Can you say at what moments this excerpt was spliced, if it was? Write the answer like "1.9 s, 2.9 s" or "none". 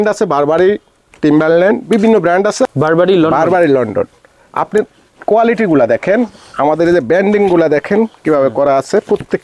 2.7 s

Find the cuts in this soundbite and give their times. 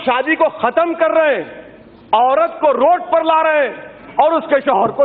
none

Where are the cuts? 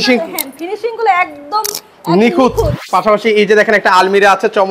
2.8 s

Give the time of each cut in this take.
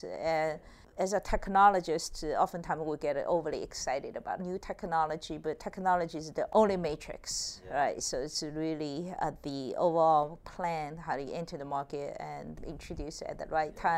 0.9 s, 4.4 s, 6.5 s, 12.5 s

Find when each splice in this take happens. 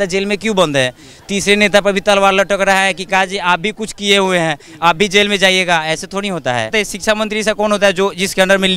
6.7 s

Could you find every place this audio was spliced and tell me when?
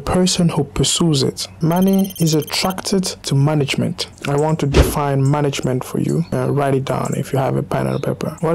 2.1 s, 4.1 s, 6.3 s

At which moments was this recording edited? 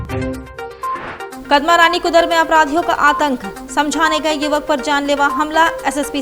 1.4 s

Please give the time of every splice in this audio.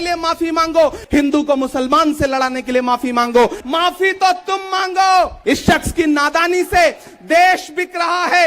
1.0 s, 3.6 s, 5.4 s

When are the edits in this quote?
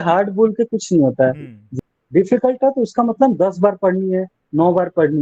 1.7 s

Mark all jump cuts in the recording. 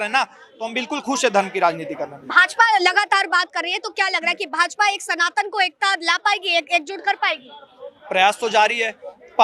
none

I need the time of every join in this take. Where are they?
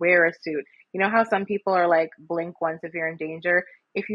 none

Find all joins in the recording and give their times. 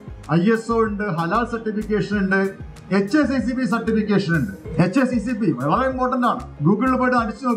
4.6 s, 6.5 s

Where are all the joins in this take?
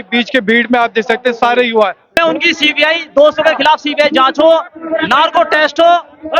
2.1 s

